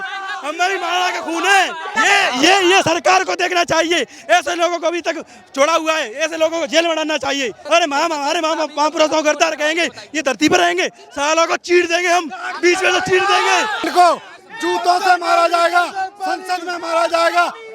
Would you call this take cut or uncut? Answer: cut